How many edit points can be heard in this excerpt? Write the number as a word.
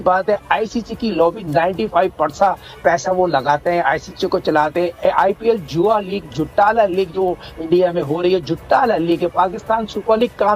zero